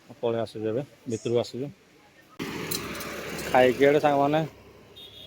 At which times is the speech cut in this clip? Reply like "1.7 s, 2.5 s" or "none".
2.4 s

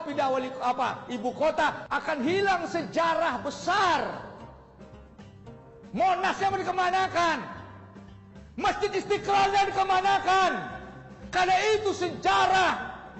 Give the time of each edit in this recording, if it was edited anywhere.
1.8 s

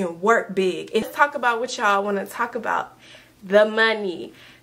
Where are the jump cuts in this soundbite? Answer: 1.0 s

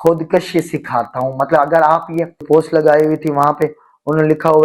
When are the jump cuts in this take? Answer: 2.4 s

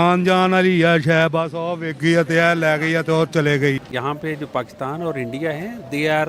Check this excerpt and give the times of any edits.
3.8 s

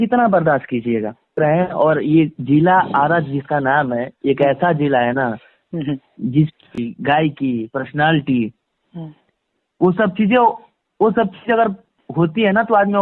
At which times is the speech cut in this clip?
1.4 s, 6.8 s

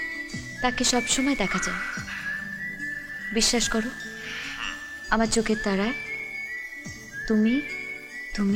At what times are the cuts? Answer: none

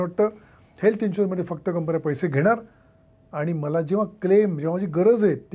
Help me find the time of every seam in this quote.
none

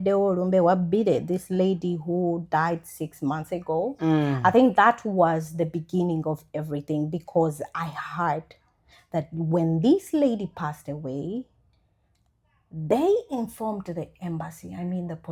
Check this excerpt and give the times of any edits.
none

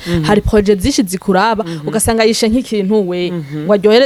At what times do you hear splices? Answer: none

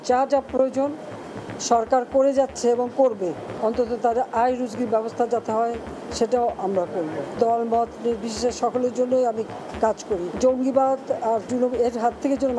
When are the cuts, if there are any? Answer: 3.5 s, 7.4 s, 10.3 s

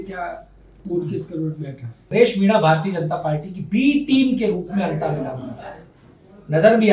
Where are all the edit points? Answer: 2.1 s

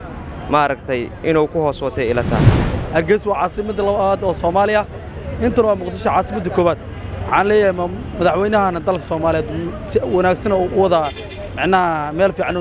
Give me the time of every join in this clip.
2.6 s

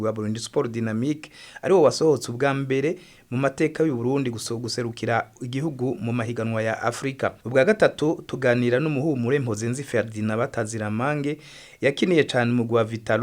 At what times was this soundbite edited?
7.3 s

